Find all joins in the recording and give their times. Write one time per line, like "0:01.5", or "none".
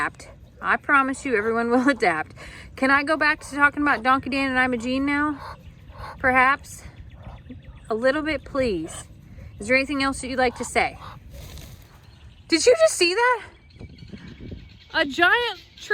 0:11.8

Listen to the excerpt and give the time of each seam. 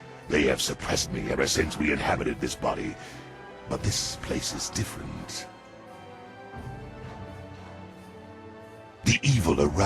none

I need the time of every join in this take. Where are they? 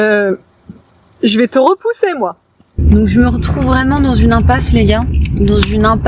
0:02.7

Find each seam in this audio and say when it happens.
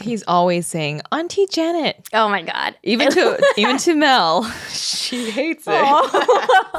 none

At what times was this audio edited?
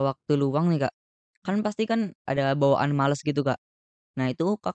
none

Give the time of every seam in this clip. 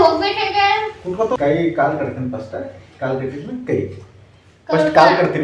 0:01.4

